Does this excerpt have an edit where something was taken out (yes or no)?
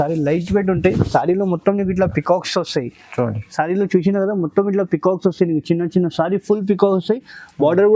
no